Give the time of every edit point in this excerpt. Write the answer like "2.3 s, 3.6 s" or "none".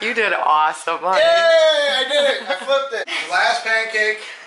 3.1 s